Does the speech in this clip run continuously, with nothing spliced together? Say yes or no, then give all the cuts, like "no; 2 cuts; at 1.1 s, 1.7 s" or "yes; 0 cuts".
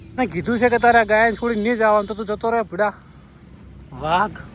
yes; 0 cuts